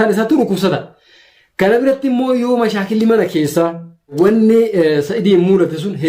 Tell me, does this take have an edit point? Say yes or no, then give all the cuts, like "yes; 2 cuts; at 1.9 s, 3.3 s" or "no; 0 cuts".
yes; 1 cut; at 4.1 s